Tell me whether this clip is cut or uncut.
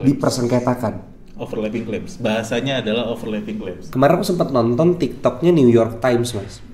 cut